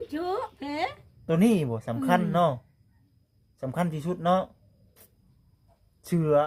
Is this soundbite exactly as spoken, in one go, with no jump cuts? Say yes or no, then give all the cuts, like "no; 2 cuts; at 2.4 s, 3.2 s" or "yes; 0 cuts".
yes; 0 cuts